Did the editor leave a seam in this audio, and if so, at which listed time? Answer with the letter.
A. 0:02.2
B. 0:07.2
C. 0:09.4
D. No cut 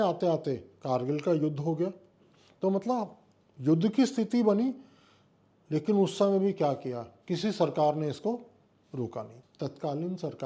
C